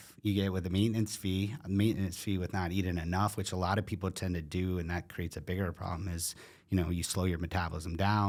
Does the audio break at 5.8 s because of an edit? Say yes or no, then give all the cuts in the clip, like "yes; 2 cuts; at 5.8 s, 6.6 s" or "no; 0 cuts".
no; 0 cuts